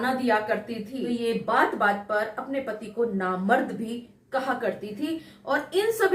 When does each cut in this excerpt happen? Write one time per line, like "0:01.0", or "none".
0:01.0